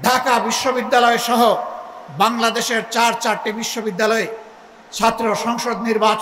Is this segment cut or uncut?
uncut